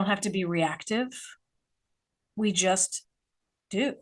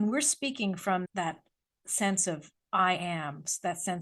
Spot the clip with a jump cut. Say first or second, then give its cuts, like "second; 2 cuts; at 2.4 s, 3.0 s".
second; 1 cut; at 1.0 s